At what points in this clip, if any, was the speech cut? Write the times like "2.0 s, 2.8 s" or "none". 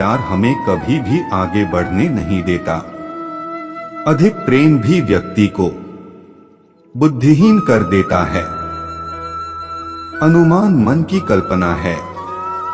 8.7 s, 10.2 s